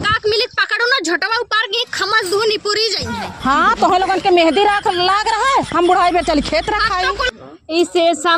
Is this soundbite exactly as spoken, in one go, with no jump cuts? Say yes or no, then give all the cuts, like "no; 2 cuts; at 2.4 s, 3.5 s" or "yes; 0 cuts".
no; 1 cut; at 7.4 s